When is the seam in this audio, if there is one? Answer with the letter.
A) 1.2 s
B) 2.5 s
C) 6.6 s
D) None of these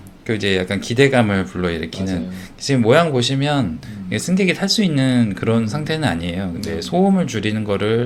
D